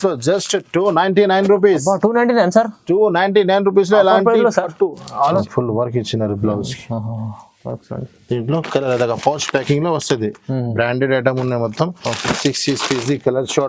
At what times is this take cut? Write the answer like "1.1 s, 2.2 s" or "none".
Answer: 5.4 s